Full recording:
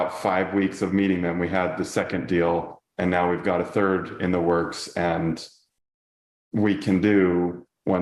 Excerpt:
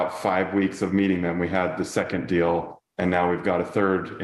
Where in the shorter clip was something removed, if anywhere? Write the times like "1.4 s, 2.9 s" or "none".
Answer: none